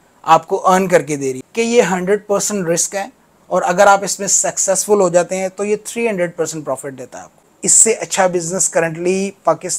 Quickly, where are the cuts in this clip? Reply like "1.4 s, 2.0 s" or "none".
1.4 s, 7.5 s

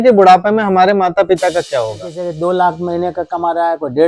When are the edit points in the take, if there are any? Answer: 2.2 s

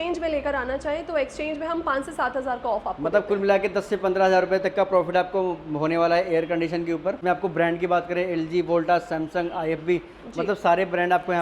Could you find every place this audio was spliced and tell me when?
7.2 s

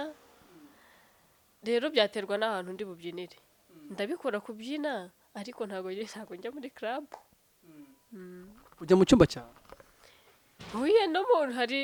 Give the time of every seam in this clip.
none

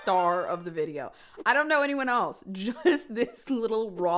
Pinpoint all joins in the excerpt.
none

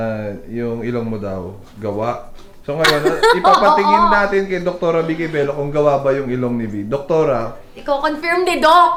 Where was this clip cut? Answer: none

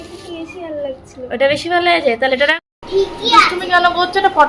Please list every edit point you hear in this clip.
2.5 s

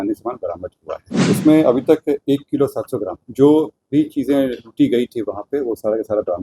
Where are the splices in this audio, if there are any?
1.1 s

